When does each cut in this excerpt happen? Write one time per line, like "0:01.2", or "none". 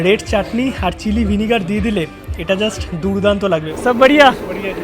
0:03.7